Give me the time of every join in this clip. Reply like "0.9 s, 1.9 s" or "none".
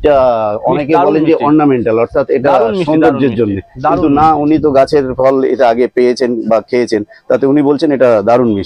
none